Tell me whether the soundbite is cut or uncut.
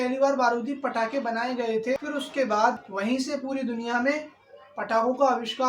uncut